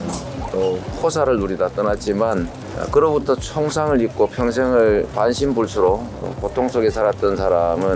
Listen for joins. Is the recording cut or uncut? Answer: cut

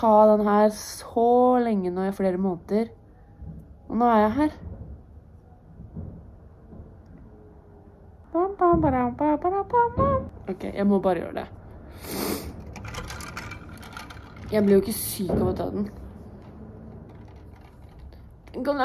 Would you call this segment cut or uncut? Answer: uncut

